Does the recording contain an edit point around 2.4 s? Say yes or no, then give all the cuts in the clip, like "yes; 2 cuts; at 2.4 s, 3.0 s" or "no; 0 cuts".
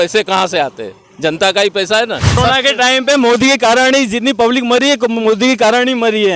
yes; 1 cut; at 2.4 s